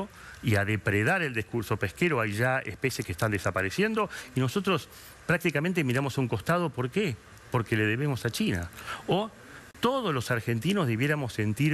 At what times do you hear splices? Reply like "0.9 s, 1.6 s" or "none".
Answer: none